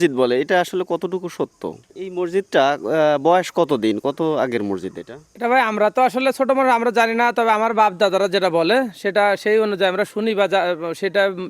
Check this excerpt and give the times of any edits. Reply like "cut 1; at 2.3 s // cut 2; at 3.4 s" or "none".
cut 1; at 1.8 s